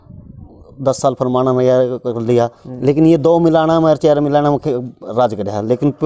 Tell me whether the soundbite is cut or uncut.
uncut